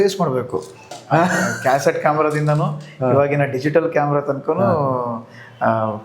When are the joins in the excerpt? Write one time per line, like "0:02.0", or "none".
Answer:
0:01.0

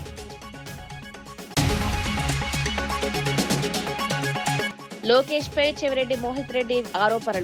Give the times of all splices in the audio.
0:01.5
0:02.9
0:04.2

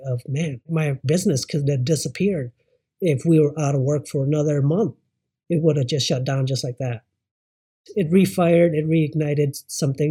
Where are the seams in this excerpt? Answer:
none

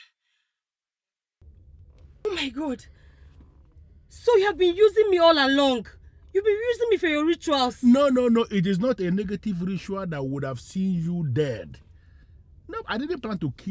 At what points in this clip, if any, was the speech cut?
0:02.2

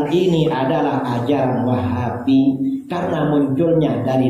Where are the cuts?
none

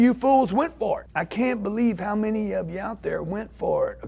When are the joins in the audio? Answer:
0:01.1

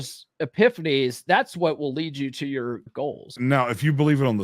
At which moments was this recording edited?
0:03.3

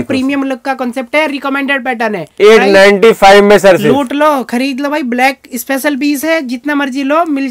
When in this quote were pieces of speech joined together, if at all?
none

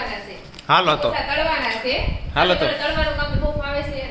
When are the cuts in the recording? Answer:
none

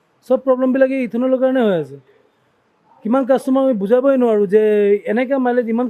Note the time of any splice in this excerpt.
none

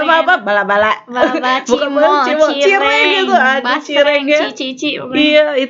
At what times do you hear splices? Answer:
none

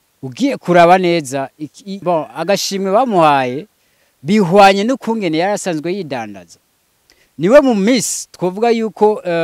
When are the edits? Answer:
0:01.9

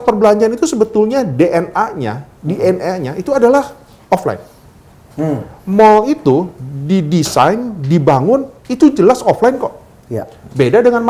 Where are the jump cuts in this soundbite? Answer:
none

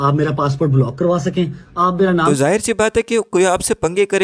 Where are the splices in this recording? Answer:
none

